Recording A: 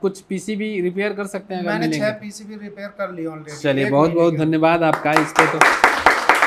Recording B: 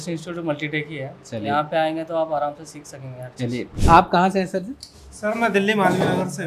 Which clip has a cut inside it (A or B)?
B